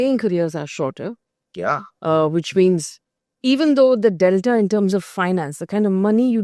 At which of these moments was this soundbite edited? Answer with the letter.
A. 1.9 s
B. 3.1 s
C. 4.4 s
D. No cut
D